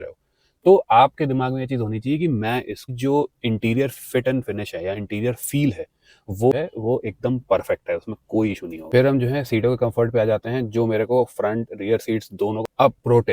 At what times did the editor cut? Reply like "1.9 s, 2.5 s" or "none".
2.9 s, 6.5 s, 12.6 s